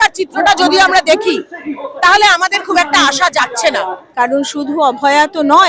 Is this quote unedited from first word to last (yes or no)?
no